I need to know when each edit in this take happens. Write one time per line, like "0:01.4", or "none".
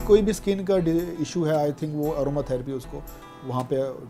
none